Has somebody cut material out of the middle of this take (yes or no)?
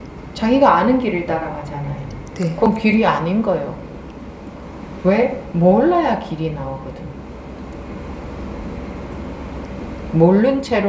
no